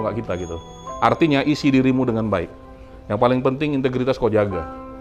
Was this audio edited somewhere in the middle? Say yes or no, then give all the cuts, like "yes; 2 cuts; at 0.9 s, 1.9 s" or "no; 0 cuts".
no; 0 cuts